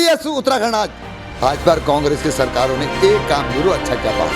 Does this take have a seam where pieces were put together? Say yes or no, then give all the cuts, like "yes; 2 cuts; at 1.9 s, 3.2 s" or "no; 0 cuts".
yes; 1 cut; at 1.4 s